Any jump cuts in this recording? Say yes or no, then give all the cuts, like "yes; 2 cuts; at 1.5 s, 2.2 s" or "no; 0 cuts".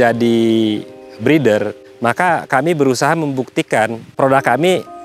yes; 2 cuts; at 1.8 s, 4.0 s